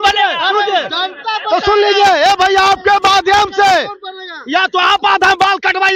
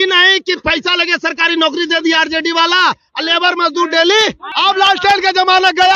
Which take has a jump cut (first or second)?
second